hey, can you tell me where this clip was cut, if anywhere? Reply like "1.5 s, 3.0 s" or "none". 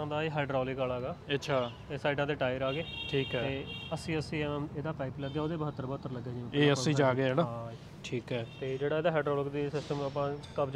none